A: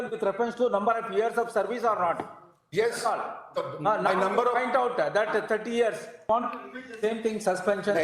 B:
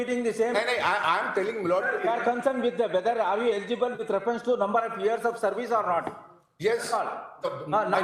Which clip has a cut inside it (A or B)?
A